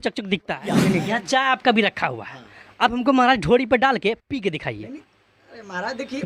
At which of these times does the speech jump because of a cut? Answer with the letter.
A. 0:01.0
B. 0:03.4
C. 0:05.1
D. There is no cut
A